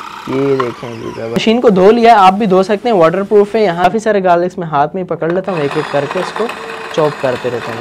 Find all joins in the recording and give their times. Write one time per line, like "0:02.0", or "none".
0:01.4
0:03.8